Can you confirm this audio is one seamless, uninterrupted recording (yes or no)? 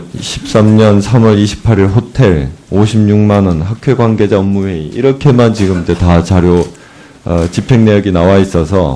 yes